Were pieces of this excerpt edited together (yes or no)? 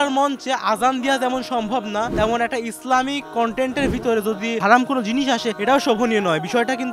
no